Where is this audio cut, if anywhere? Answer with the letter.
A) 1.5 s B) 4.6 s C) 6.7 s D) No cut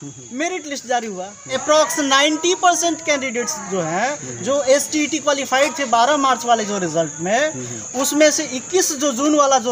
A